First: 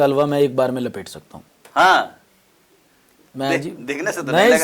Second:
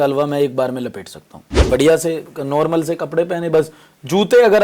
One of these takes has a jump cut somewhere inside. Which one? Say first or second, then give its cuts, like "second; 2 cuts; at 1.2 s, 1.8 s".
second; 1 cut; at 1.7 s